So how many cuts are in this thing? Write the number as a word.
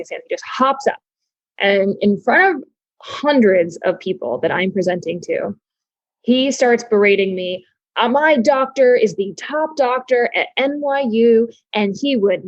zero